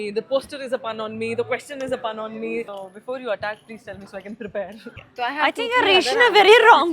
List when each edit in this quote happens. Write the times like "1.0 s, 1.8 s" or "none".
2.8 s, 4.9 s